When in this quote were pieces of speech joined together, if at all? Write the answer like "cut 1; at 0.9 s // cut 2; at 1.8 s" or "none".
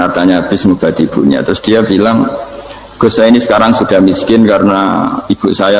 none